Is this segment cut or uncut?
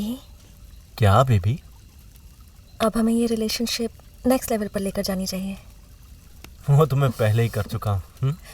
uncut